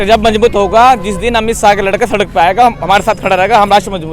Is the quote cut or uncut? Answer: uncut